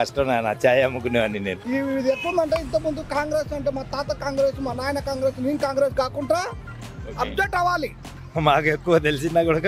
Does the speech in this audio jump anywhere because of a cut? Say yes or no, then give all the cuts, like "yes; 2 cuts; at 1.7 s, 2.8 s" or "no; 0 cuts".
yes; 2 cuts; at 1.6 s, 8.3 s